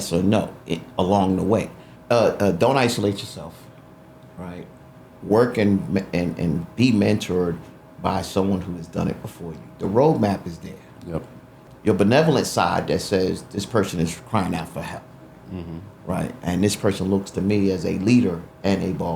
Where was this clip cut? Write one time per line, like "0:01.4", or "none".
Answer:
0:01.9
0:11.6